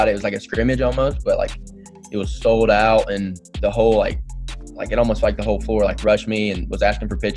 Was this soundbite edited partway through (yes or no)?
no